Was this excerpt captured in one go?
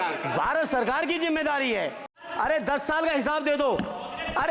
no; 1 cut; at 2.1 s

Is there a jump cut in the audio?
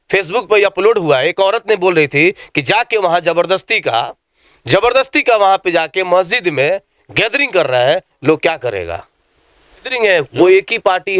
yes; 1 cut; at 9.9 s

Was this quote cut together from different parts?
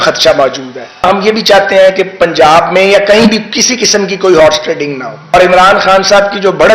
yes; 2 cuts; at 1.1 s, 5.3 s

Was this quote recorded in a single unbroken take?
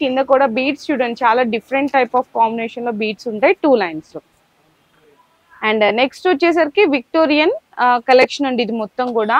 yes; 0 cuts

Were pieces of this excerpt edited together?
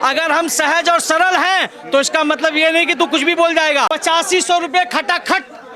yes; 1 cut; at 3.9 s

